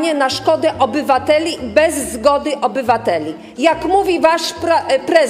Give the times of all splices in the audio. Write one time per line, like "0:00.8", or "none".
none